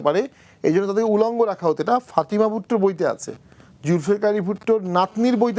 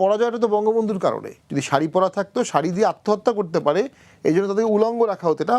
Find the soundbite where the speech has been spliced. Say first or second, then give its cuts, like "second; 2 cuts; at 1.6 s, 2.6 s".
second; 1 cut; at 1.3 s